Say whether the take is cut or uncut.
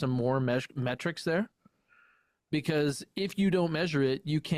uncut